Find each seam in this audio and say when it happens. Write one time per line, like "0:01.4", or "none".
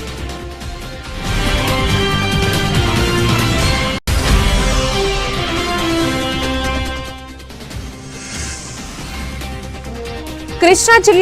none